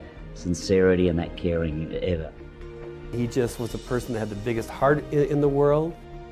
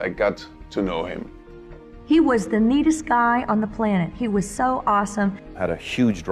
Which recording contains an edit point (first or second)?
first